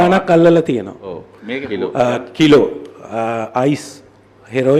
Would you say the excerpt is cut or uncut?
uncut